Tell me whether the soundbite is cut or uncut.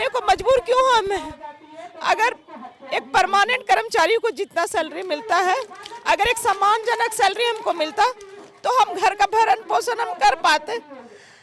uncut